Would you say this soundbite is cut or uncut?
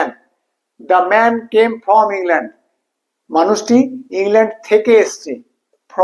uncut